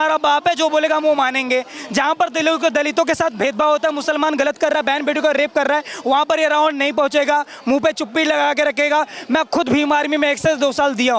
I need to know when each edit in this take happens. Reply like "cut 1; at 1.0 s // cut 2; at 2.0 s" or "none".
none

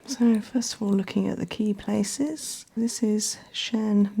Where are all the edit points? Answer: cut 1; at 2.8 s

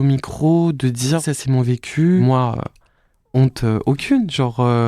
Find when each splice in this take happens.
cut 1; at 2.2 s

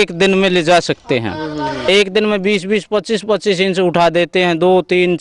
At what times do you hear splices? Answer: cut 1; at 1.9 s

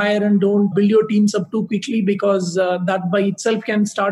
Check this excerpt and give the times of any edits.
none

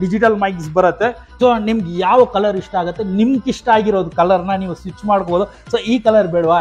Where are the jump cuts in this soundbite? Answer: cut 1; at 1.3 s

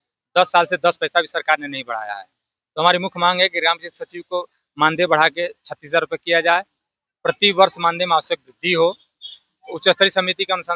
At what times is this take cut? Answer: none

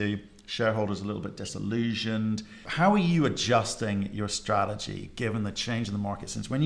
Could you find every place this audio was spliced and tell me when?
cut 1; at 2.6 s

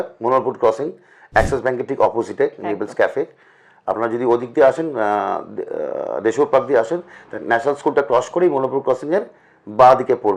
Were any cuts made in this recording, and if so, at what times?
none

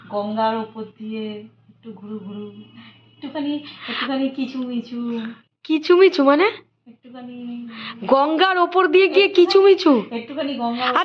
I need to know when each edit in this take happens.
none

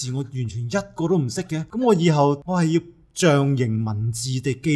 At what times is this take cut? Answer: cut 1; at 1.7 s // cut 2; at 2.4 s

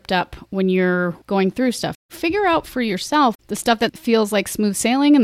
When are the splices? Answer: cut 1; at 1.2 s // cut 2; at 2.1 s // cut 3; at 3.9 s

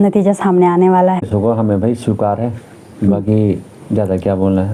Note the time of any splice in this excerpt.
cut 1; at 1.2 s

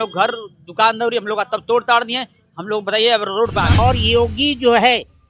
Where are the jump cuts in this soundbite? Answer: cut 1; at 3.8 s

